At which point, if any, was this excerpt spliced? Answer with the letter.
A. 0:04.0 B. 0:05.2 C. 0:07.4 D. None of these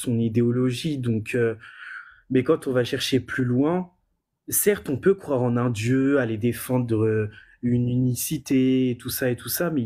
D